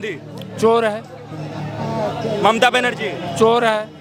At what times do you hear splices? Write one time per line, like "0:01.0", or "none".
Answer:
none